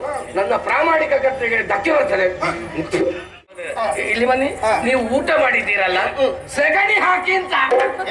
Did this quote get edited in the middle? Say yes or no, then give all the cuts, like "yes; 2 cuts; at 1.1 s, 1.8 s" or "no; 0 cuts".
yes; 1 cut; at 3.6 s